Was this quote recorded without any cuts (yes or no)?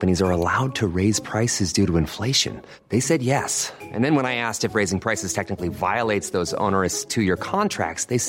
yes